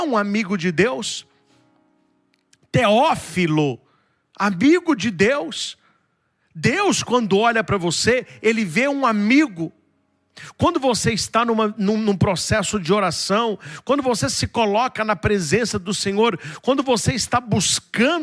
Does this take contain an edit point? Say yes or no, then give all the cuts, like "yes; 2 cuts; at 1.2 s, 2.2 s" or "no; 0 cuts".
no; 0 cuts